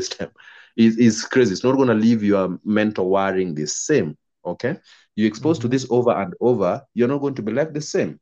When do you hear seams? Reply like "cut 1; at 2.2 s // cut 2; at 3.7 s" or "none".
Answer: none